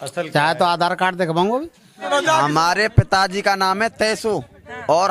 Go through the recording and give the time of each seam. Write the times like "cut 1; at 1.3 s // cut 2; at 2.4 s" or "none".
cut 1; at 2.0 s